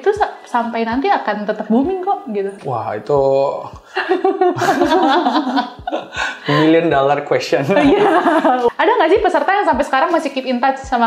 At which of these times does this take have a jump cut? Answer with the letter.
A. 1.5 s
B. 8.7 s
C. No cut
B